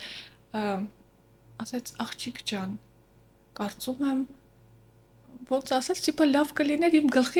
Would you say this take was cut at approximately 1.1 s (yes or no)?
no